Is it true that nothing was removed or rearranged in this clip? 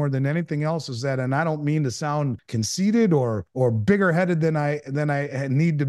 no; 2 cuts; at 2.4 s, 3.4 s

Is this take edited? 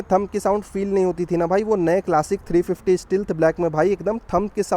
no; 0 cuts

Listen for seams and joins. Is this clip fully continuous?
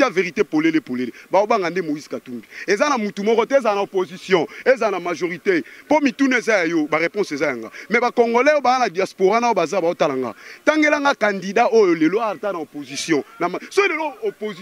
yes; 0 cuts

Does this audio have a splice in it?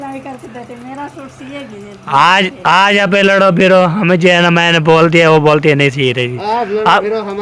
no; 0 cuts

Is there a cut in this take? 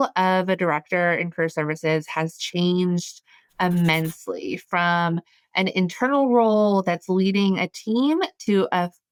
no; 0 cuts

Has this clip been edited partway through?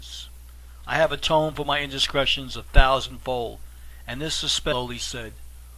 no; 0 cuts

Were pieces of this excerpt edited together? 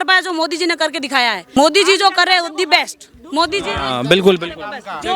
yes; 1 cut; at 1.5 s

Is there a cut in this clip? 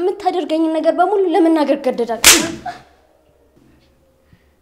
no; 0 cuts

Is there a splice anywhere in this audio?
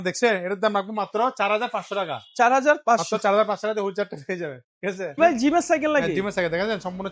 no; 0 cuts

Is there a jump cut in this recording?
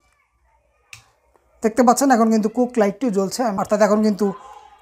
yes; 1 cut; at 3.6 s

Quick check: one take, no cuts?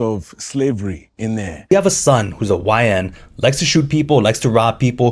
no; 1 cut; at 1.5 s

